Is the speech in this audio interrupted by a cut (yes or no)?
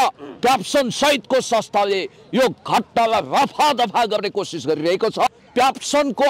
yes